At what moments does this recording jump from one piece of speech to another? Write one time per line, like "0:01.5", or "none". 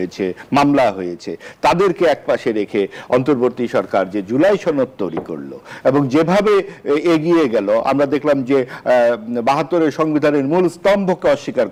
none